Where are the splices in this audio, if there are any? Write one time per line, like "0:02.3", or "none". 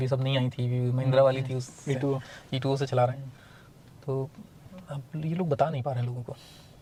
none